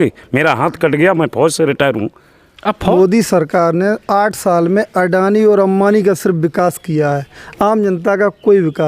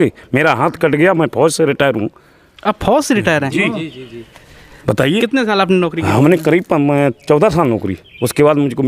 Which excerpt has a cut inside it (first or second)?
first